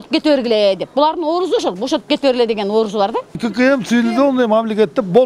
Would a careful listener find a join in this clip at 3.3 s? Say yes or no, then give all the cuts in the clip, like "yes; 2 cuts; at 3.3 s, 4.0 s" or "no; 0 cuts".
yes; 1 cut; at 3.3 s